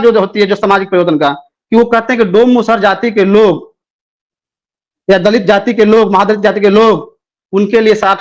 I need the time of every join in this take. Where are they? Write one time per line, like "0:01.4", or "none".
none